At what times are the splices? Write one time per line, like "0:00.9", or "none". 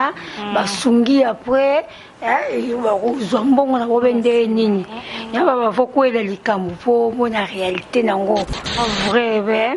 0:08.8